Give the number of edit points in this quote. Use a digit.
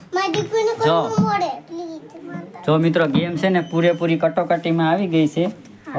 0